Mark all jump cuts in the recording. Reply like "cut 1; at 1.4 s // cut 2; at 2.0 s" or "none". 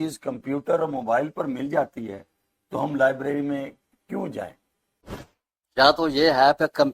cut 1; at 5.3 s